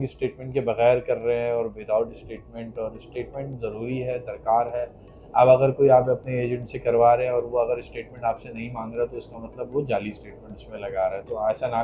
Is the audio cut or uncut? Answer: uncut